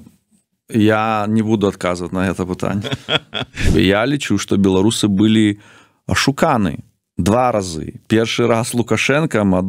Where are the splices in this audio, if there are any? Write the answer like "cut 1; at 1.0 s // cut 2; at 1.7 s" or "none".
cut 1; at 3.6 s